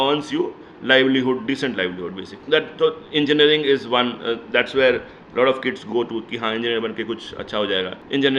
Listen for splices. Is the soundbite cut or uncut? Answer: uncut